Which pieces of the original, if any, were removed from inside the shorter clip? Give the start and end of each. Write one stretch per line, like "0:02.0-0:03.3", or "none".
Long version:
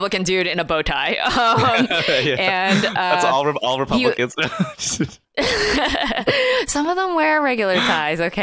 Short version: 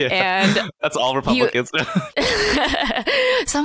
0:03.2-0:03.6
0:04.7-0:05.3